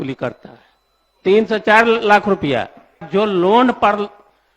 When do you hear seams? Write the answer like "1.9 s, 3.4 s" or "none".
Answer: 3.0 s